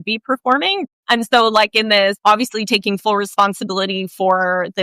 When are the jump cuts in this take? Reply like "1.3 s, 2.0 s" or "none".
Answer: 0.8 s, 2.2 s